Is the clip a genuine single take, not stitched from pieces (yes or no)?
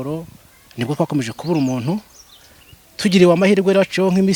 yes